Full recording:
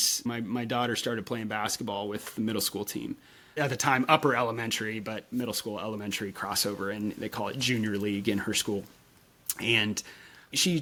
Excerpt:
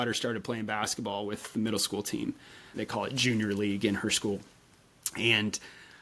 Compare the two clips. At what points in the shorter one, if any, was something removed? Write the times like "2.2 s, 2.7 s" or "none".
2.7 s